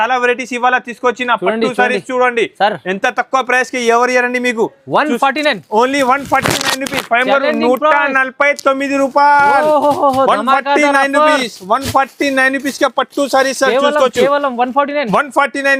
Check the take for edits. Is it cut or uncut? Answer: uncut